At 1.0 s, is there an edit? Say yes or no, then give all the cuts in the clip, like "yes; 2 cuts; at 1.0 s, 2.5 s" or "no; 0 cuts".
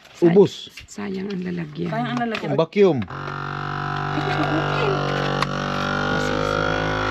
no; 1 cut; at 2.5 s